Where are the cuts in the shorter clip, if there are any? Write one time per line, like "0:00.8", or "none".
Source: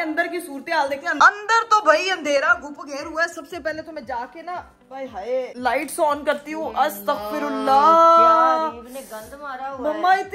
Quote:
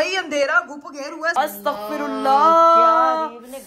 0:01.3